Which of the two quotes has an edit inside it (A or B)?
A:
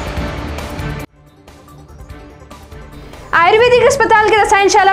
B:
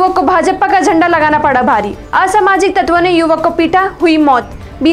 A